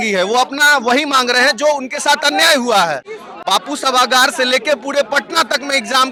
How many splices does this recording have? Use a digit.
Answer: 0